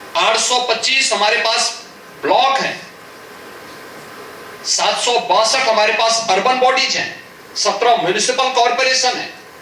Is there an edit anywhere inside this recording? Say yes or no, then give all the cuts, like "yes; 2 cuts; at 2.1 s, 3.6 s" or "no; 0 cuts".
no; 0 cuts